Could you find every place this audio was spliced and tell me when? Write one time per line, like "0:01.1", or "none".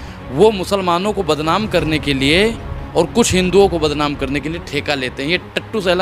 none